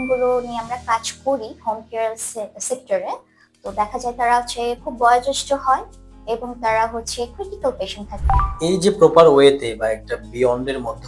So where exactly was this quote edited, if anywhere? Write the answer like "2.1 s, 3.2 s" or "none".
8.1 s